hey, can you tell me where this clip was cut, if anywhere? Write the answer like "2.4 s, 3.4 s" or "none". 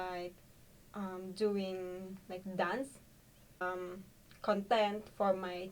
3.6 s